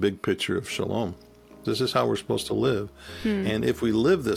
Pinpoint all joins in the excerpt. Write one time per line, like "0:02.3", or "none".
0:01.5